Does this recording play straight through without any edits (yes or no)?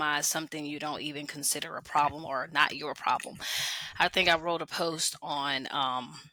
yes